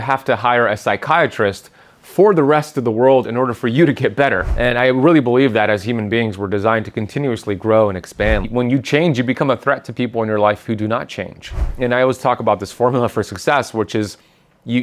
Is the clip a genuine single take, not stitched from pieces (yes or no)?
no